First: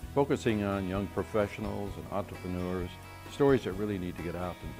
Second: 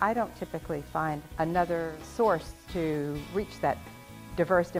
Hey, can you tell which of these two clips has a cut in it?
second; 3 cuts; at 1.3 s, 2.0 s, 2.6 s

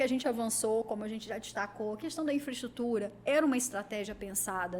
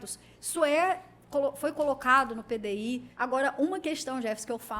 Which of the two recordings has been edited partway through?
second; 1 cut; at 3.1 s

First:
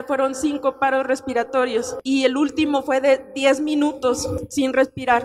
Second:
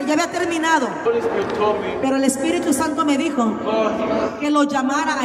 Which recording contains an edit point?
first; 2 cuts; at 1.9 s, 4.4 s

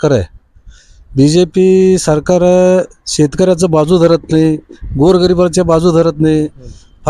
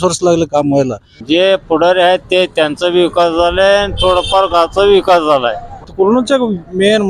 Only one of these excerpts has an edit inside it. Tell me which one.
second; 2 cuts; at 1.2 s, 5.7 s

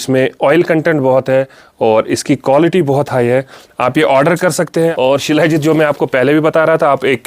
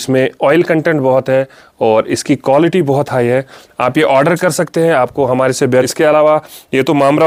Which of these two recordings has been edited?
first; 1 cut; at 4.9 s

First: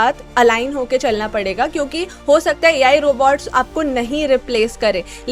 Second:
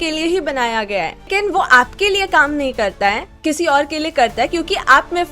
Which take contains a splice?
second; 2 cuts; at 1.3 s, 3.3 s

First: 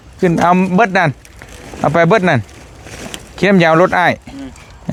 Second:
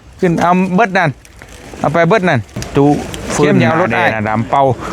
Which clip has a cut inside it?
second; 1 cut; at 2.6 s

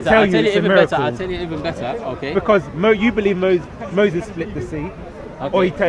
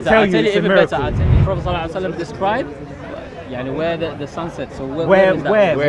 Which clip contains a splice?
second; 1 cut; at 1.2 s

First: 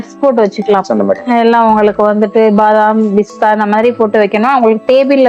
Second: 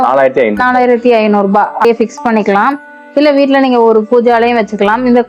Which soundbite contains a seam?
second; 1 cut; at 1.9 s

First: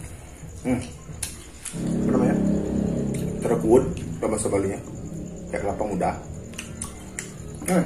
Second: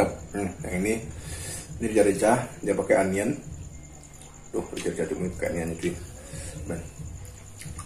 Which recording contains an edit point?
first; 1 cut; at 1.8 s

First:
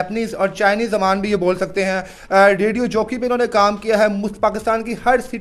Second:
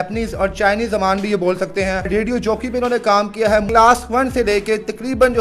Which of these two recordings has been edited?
second; 2 cuts; at 2.1 s, 3.7 s

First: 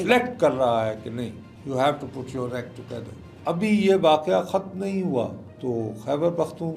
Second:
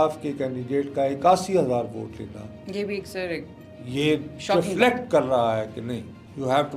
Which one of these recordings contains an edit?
first; 2 cuts; at 3.4 s, 5.5 s

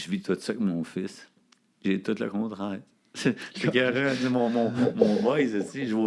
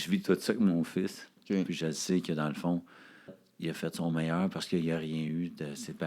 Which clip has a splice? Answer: second; 2 cuts; at 1.3 s, 3.5 s

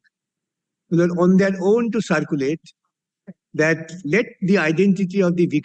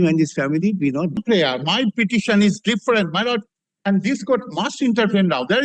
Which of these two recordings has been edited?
second; 1 cut; at 1.2 s

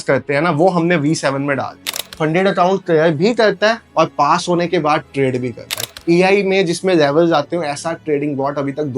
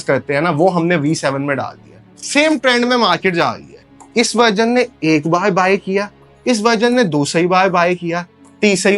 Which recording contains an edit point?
first; 2 cuts; at 2.0 s, 5.8 s

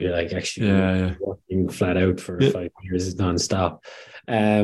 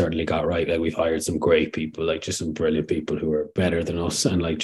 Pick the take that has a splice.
second; 1 cut; at 3.5 s

